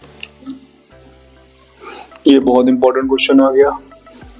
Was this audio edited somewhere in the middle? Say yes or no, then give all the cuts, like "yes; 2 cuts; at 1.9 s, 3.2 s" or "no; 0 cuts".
no; 0 cuts